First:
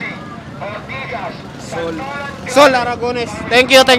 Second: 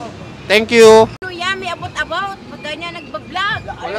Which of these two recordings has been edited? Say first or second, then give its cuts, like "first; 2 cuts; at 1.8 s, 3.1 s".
second; 1 cut; at 1.3 s